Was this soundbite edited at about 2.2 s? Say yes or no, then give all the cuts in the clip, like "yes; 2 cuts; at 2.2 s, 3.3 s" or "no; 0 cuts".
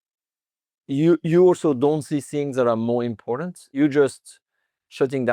no; 1 cut; at 3.8 s